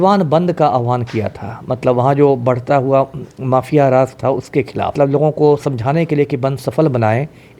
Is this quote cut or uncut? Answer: cut